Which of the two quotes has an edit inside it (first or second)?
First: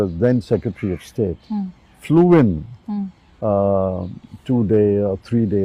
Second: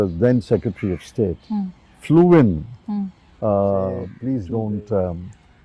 second